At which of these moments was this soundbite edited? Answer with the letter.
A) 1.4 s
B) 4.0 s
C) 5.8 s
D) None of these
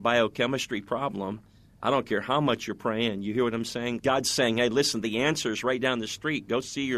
B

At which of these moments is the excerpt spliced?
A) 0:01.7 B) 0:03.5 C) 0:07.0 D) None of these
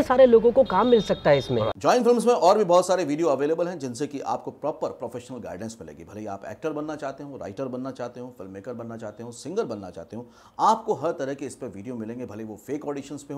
A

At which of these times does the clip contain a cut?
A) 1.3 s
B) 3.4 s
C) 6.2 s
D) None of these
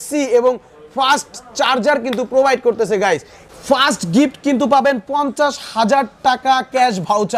B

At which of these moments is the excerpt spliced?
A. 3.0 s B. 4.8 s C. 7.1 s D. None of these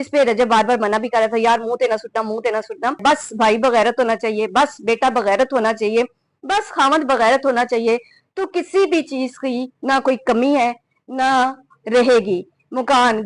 A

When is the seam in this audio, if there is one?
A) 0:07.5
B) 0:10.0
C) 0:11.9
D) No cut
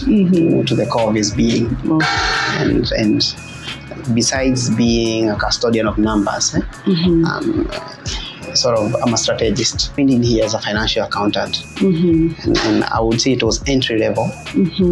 B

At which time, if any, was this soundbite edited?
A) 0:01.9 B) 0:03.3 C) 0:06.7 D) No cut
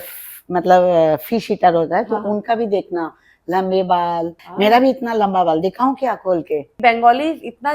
C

